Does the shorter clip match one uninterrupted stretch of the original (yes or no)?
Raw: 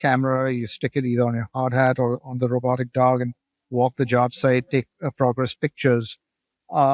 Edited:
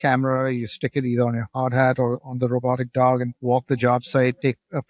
no